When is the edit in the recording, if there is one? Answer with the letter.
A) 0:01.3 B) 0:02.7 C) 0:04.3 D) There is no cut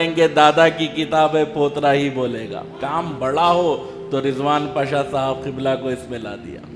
B